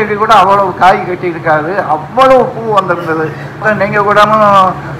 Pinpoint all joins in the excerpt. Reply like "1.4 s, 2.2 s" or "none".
3.6 s